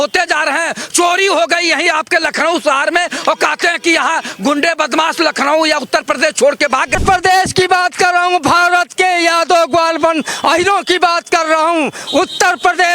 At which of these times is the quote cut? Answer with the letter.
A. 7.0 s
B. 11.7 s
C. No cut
A